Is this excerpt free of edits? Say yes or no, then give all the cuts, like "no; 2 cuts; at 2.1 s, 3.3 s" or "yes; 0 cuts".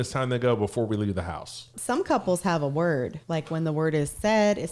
no; 2 cuts; at 1.7 s, 3.2 s